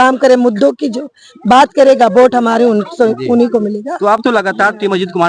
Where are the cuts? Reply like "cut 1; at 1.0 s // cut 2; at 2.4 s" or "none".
none